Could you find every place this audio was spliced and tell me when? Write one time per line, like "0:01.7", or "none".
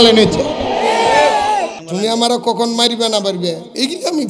0:01.8